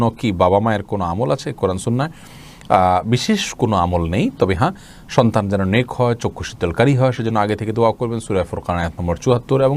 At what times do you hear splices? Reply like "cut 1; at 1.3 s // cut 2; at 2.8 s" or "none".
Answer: none

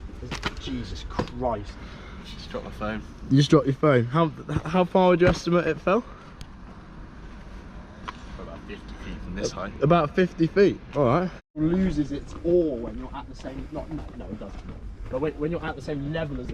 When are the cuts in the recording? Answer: cut 1; at 1.8 s // cut 2; at 11.4 s

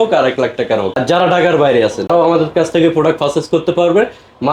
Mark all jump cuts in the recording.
cut 1; at 0.9 s // cut 2; at 2.1 s

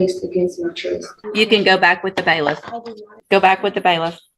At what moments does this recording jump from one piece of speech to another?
cut 1; at 1.2 s // cut 2; at 3.1 s

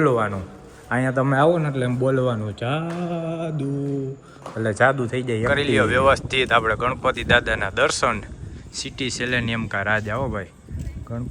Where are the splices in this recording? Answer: cut 1; at 5.5 s

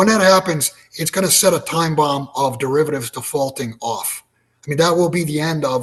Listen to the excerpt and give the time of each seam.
none

